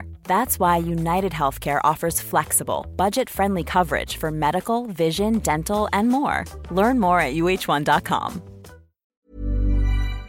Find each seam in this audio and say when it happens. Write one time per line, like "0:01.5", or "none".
0:09.1